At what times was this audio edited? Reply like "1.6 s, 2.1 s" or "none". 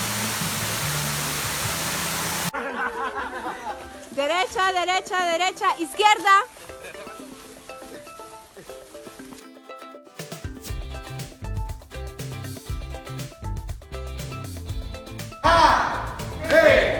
none